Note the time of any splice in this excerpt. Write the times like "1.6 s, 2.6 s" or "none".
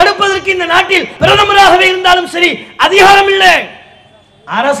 1.1 s